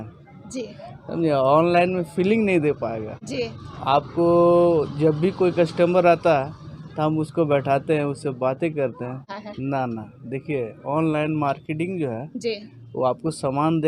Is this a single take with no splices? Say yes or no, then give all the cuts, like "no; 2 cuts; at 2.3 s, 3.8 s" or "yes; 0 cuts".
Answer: no; 1 cut; at 9.3 s